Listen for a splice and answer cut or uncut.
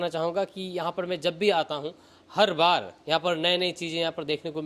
uncut